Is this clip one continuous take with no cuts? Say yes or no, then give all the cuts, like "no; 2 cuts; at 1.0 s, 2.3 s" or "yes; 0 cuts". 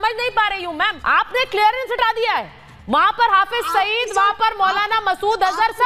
no; 1 cut; at 1.0 s